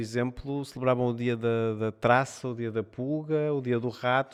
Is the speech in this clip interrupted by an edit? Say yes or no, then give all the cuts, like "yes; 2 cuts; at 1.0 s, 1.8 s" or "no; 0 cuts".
no; 0 cuts